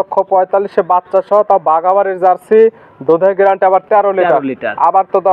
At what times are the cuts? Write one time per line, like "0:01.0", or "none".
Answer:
none